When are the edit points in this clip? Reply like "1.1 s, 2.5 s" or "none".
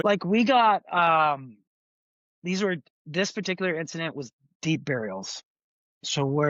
none